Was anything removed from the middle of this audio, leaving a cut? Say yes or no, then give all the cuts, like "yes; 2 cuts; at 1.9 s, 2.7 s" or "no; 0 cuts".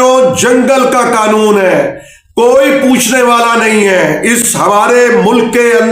no; 0 cuts